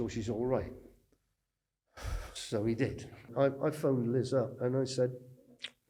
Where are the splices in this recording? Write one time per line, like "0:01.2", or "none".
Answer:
0:03.2